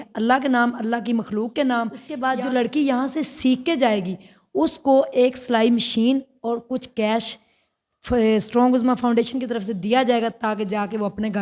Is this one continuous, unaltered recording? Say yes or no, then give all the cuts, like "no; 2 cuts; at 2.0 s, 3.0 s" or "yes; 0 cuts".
no; 1 cut; at 2.0 s